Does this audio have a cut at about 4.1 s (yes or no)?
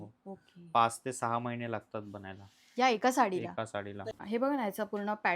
yes